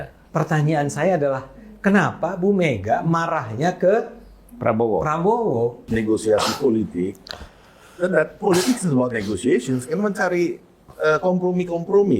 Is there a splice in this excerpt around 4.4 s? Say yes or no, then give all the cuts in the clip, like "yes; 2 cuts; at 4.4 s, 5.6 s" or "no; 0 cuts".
no; 1 cut; at 5.8 s